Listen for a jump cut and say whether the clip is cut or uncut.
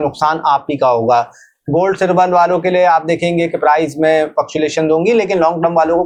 uncut